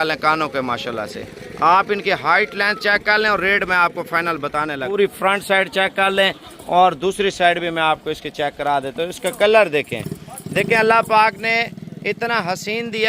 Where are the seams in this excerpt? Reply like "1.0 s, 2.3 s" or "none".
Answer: 4.8 s